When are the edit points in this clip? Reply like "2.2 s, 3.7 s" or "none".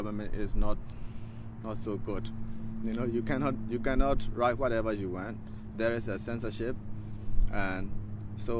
none